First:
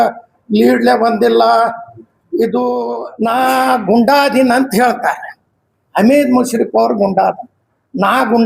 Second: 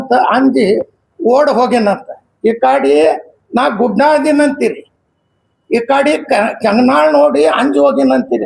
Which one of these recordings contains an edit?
first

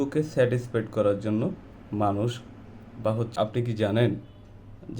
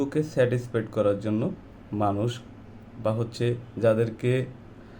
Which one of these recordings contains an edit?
first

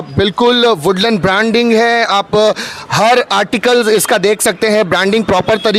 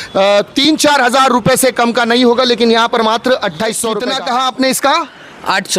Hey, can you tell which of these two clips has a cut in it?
second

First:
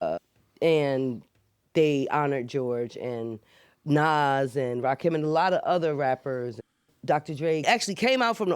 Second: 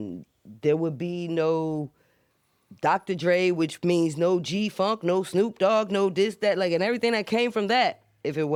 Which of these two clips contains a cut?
first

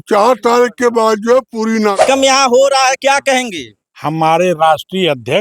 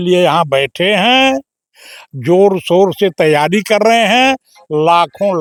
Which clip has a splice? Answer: first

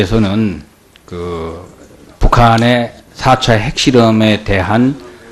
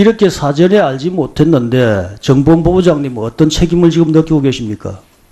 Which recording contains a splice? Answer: first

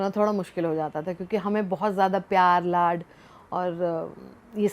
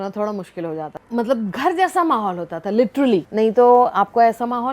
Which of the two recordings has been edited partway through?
second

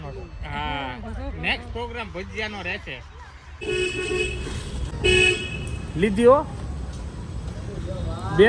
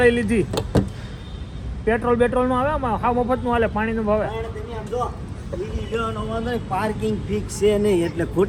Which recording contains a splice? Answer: first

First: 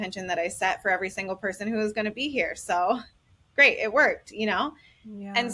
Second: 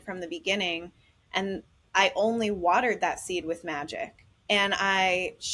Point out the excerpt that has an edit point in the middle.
second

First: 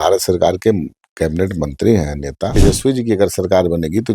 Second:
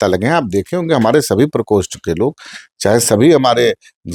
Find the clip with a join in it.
first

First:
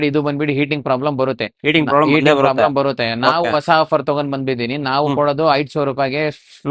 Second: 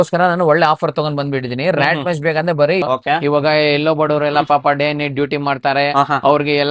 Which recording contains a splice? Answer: second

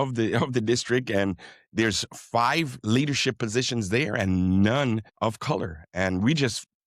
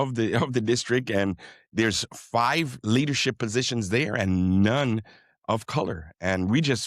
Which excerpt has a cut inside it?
first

